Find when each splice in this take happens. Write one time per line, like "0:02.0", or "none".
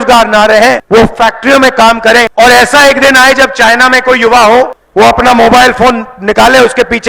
0:00.8
0:02.3
0:04.8